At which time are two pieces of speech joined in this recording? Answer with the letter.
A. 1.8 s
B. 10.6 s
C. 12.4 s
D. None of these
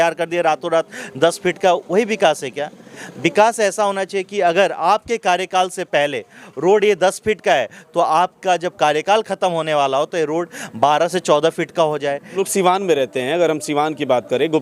C